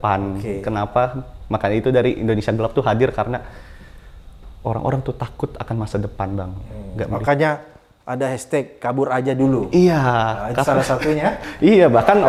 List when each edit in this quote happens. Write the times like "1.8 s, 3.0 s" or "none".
none

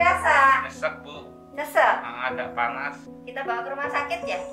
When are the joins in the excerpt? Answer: 3.1 s

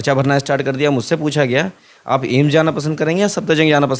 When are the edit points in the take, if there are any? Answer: none

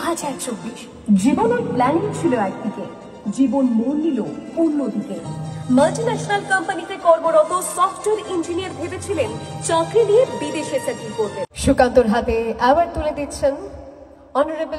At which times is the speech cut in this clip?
11.5 s

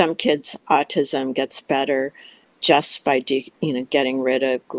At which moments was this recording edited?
none

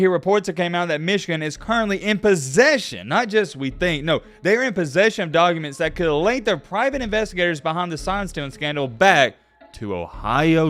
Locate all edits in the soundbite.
none

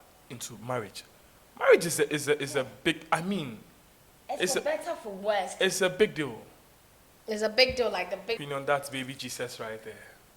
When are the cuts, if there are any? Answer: 8.4 s

